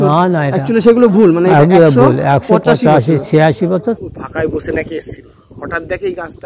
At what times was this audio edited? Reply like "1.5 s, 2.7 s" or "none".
4.0 s

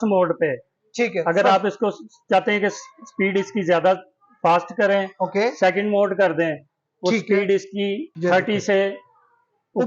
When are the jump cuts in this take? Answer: 8.1 s

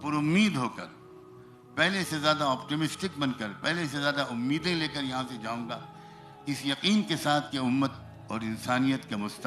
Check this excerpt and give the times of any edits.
none

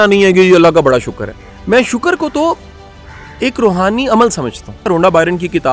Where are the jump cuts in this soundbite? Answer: 1.3 s, 4.8 s

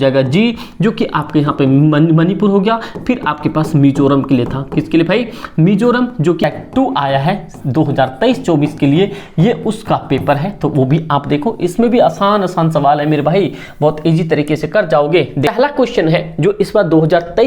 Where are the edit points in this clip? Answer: 6.4 s, 15.5 s

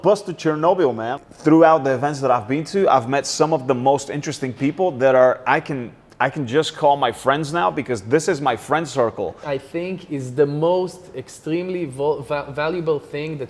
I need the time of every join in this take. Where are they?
1.1 s, 9.4 s

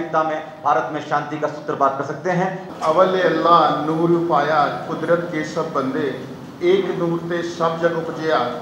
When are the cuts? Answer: 2.6 s

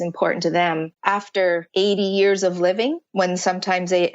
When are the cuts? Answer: 1.4 s, 3.0 s

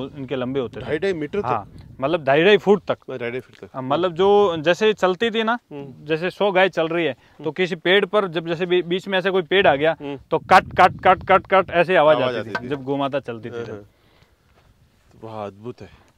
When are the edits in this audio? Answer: none

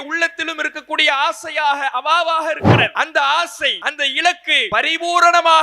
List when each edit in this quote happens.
2.9 s, 3.8 s, 4.6 s

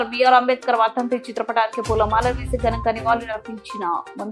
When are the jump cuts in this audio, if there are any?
none

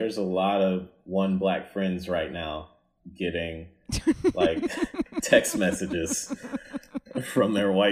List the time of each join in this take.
0.9 s

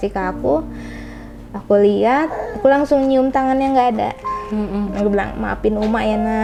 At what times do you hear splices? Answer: none

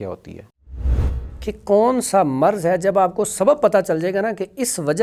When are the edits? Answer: 1.0 s

